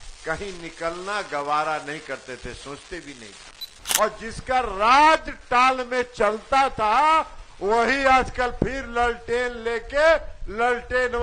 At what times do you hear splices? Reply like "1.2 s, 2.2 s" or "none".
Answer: 3.8 s